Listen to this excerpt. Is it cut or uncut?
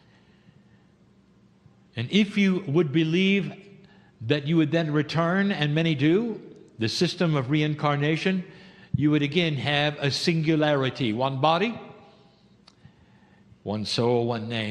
cut